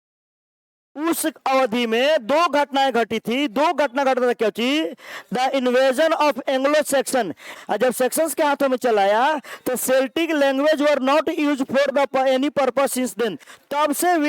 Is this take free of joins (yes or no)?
no